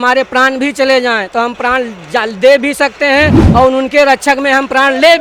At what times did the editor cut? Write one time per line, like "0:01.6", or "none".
none

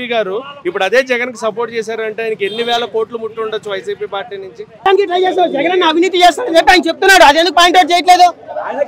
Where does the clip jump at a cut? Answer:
0:04.9

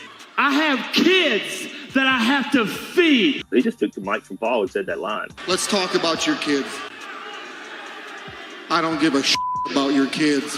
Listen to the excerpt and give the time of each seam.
0:03.4

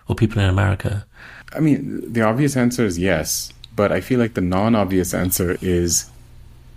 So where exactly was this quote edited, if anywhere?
0:01.4

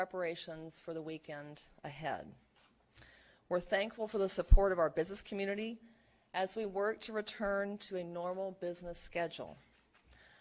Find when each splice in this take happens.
0:01.0

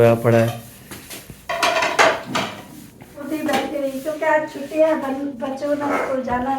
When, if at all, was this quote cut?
0:03.2

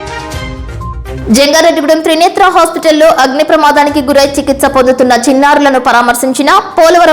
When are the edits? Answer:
0:00.9

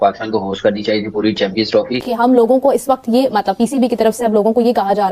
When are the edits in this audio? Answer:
0:02.0

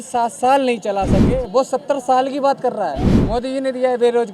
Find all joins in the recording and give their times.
0:03.1

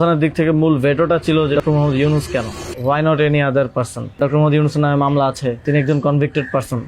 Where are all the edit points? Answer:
0:01.6
0:02.6
0:04.2
0:05.6

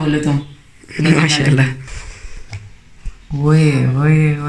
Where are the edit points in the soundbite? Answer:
0:01.9

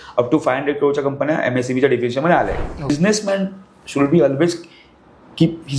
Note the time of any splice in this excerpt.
0:02.9

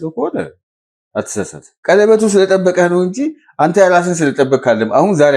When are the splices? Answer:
0:01.7

